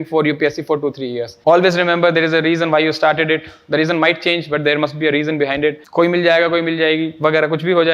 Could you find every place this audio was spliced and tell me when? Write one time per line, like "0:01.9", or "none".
0:01.3